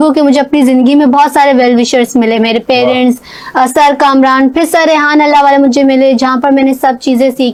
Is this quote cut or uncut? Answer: uncut